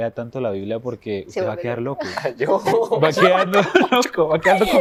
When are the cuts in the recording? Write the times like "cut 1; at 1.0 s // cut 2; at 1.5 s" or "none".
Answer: none